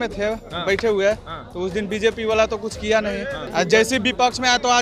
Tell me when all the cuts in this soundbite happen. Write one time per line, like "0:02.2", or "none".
0:03.4